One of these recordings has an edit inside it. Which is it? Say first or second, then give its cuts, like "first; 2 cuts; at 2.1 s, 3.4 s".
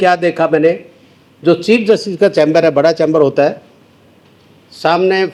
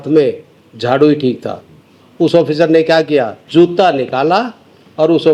second; 1 cut; at 3.4 s